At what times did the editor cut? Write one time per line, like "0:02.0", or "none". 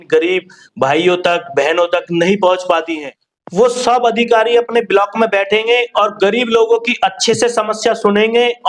0:02.9